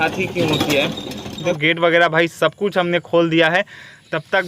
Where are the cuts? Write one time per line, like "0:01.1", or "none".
0:01.6